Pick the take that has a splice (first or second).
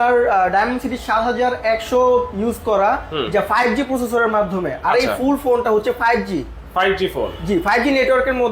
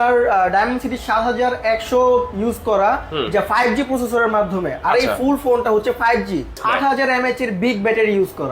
second